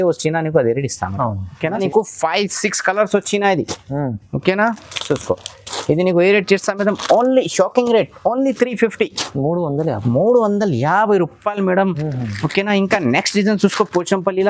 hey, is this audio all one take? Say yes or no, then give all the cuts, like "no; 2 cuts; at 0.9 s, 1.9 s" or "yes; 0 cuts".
no; 1 cut; at 1.8 s